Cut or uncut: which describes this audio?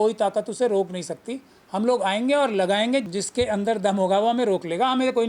cut